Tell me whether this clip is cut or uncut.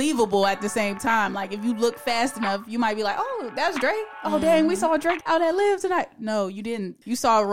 cut